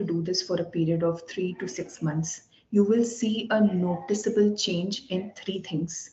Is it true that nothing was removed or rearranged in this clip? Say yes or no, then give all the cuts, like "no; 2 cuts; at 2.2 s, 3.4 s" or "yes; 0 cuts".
yes; 0 cuts